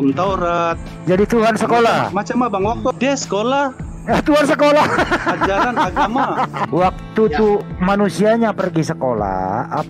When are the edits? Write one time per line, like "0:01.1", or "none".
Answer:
0:06.6